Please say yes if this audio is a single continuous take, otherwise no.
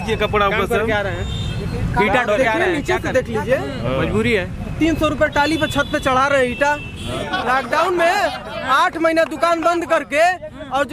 no